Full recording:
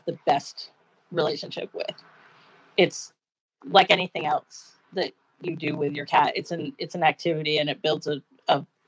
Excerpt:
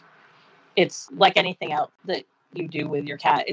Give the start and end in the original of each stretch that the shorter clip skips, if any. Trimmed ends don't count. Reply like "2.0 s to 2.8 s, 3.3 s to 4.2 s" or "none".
3.0 s to 3.6 s, 4.5 s to 4.9 s